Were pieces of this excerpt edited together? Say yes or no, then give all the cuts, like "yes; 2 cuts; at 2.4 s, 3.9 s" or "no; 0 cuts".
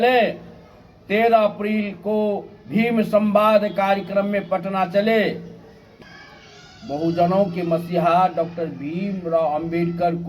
yes; 1 cut; at 5.9 s